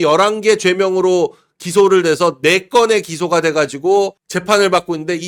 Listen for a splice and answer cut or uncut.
uncut